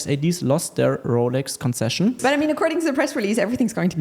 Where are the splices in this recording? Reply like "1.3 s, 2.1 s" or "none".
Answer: 2.2 s